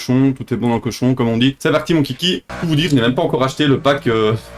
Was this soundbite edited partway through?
yes; 2 cuts; at 1.6 s, 2.5 s

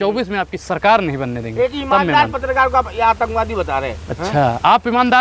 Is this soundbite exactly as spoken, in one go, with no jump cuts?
yes; 0 cuts

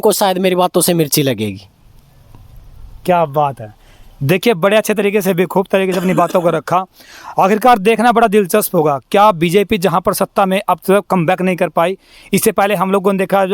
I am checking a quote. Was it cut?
no; 0 cuts

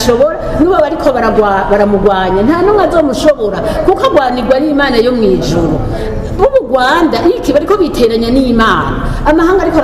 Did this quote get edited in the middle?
no; 0 cuts

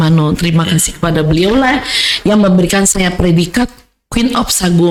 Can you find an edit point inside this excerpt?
no; 0 cuts

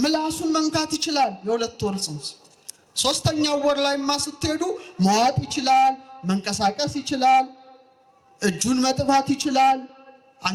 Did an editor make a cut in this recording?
no; 0 cuts

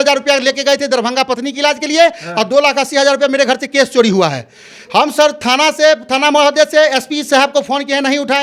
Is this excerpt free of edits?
yes; 0 cuts

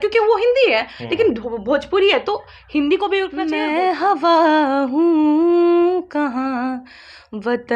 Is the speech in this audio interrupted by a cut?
yes; 1 cut; at 3.5 s

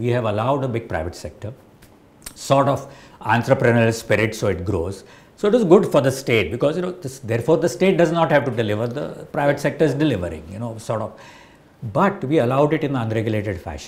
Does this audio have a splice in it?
no; 0 cuts

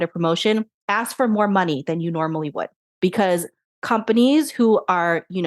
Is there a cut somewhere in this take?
yes; 1 cut; at 2.8 s

